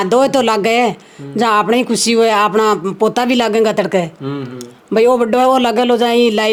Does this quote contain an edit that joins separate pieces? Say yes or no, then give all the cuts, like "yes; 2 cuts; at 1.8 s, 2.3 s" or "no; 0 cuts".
no; 0 cuts